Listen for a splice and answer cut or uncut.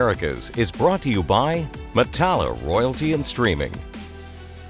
cut